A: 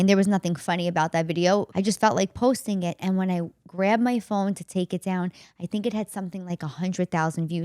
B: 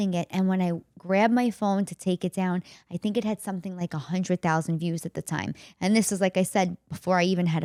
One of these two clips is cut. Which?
A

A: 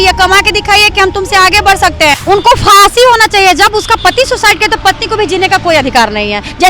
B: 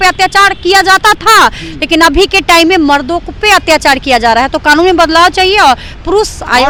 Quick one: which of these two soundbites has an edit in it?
A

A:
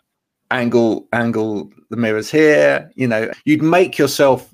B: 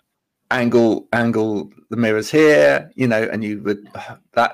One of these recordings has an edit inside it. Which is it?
A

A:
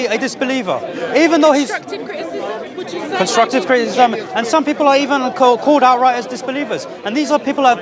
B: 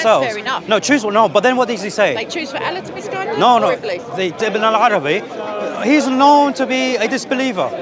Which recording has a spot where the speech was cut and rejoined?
B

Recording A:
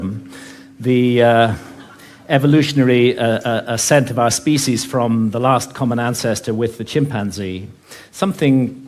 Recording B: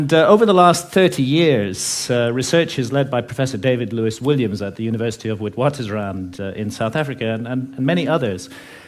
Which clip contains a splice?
B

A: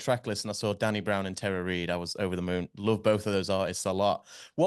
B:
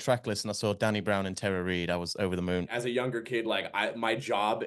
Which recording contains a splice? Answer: B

